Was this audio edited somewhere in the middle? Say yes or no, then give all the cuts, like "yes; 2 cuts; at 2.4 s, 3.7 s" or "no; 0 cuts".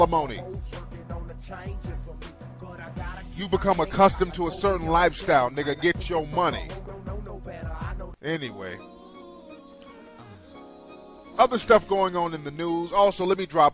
yes; 1 cut; at 3.1 s